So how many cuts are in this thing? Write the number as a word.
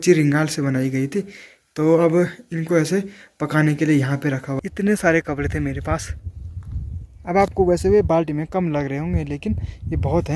one